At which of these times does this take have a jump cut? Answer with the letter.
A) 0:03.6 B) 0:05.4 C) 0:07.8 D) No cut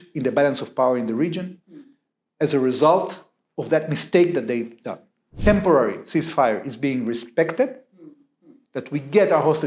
B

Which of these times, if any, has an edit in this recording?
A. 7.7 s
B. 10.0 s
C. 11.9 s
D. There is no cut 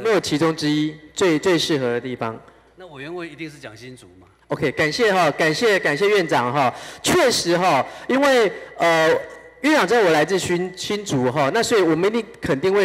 D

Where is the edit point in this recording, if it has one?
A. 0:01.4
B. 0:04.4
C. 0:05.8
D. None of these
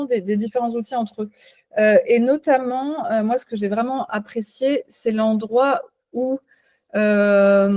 D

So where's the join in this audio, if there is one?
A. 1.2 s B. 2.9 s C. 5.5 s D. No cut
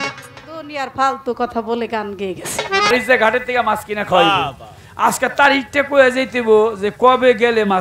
B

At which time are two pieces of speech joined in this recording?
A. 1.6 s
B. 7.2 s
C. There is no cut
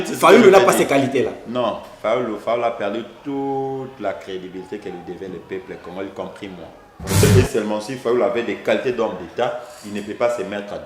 B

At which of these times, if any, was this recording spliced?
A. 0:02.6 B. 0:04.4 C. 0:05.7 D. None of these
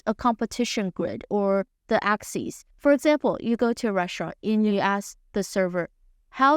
A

